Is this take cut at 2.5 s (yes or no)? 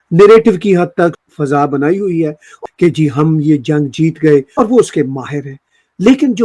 yes